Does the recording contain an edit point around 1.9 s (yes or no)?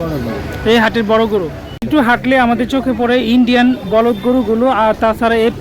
yes